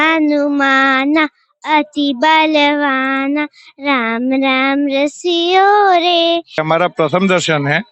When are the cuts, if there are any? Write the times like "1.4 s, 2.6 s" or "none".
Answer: 6.6 s

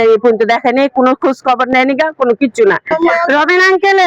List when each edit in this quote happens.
2.9 s

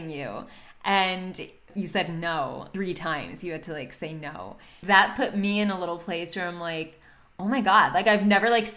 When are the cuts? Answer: 1.7 s, 2.7 s, 4.7 s

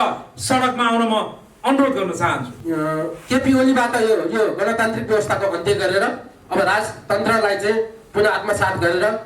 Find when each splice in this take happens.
2.5 s

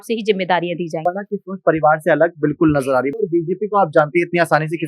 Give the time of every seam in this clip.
1.0 s, 3.1 s

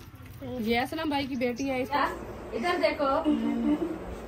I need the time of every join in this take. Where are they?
1.9 s

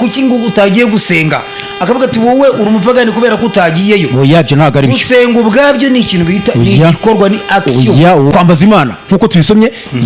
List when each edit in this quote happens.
8.3 s

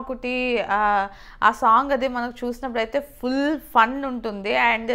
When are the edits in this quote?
none

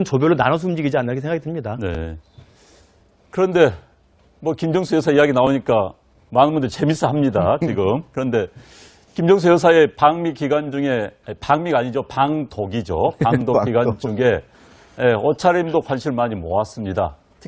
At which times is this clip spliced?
none

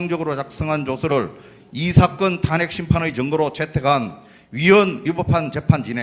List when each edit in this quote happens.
1.2 s

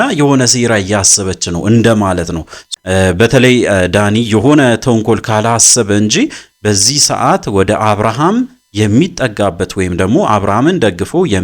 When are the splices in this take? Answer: 2.7 s

